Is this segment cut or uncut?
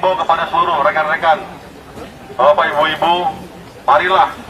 uncut